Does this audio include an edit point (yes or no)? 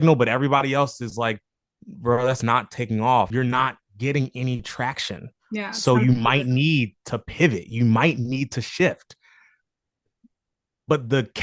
yes